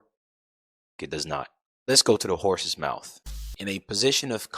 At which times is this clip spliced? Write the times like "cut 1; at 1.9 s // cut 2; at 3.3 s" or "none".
cut 1; at 3.4 s